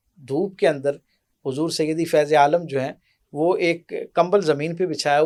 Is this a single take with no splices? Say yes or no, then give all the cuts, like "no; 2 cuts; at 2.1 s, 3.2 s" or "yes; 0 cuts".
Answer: yes; 0 cuts